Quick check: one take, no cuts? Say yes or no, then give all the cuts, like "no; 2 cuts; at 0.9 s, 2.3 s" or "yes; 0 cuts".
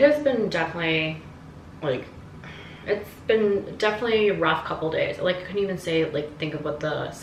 yes; 0 cuts